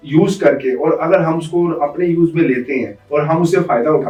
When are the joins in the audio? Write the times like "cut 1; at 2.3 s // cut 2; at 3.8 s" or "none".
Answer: none